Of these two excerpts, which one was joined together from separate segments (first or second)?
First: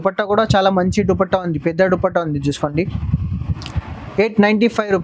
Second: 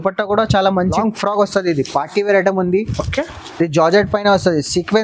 second